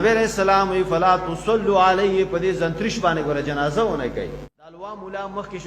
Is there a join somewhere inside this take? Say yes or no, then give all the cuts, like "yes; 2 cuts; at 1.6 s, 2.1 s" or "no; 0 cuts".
yes; 1 cut; at 4.4 s